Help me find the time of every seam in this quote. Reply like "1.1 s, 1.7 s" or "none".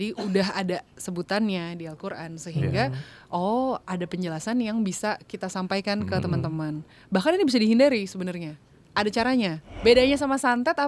9.7 s